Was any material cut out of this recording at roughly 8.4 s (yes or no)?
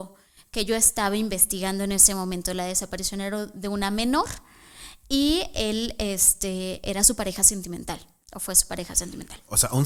no